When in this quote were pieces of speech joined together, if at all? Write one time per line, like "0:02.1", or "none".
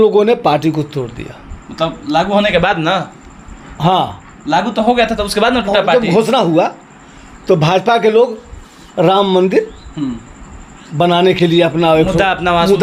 none